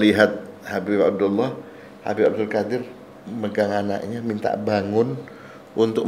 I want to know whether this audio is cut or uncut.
uncut